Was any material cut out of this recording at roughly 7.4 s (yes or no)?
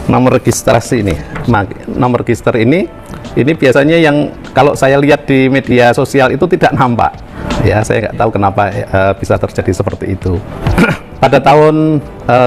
yes